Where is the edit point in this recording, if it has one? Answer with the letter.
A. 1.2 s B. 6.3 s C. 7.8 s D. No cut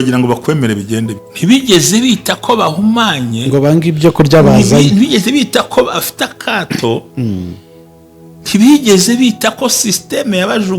A